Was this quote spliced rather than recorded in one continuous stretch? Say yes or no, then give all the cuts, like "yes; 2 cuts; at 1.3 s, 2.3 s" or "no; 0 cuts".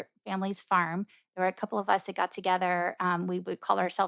no; 0 cuts